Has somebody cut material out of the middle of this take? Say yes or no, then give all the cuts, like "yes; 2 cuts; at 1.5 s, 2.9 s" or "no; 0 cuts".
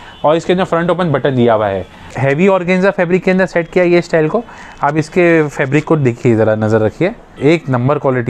yes; 2 cuts; at 2.0 s, 7.3 s